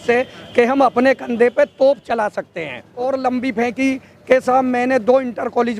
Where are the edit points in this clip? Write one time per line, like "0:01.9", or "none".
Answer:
0:03.0

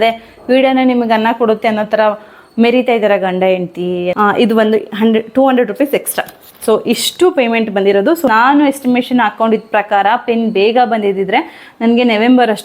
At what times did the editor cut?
0:04.1
0:08.3

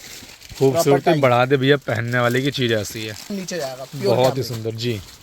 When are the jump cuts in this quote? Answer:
0:03.3

